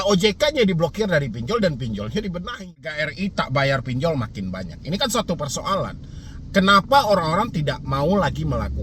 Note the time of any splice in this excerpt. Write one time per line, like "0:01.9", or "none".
0:03.1